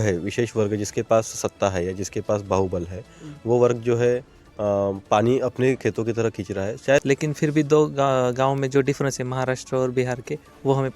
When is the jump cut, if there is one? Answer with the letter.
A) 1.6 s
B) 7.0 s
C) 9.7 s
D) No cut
B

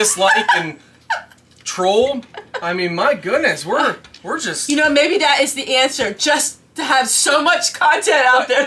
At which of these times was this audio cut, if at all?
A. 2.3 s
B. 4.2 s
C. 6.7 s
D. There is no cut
D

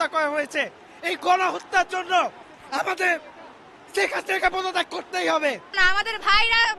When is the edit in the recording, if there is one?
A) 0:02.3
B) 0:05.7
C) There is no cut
C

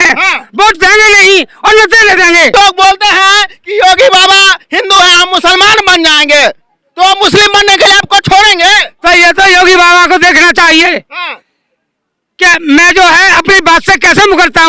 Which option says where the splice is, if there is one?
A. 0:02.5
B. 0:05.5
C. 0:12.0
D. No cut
A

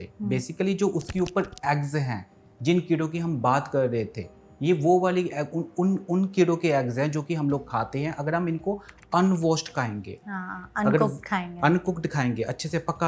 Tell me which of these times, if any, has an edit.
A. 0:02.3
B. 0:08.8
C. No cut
C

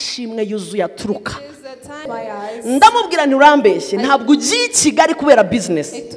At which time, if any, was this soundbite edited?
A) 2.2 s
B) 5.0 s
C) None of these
A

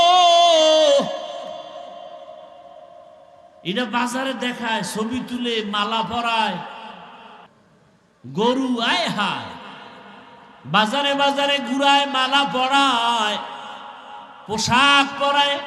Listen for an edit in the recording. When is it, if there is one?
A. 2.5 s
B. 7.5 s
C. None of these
B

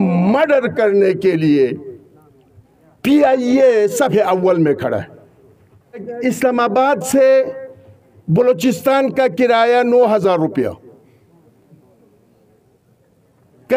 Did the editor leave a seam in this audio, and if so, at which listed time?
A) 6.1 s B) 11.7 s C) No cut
A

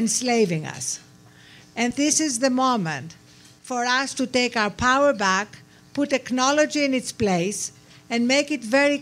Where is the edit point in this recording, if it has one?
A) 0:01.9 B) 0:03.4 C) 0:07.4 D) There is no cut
A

